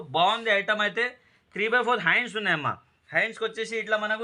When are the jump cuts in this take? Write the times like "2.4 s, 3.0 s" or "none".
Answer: none